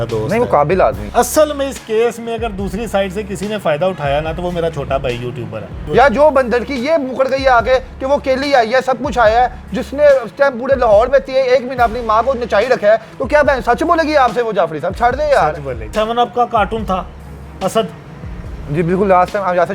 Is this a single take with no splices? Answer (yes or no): no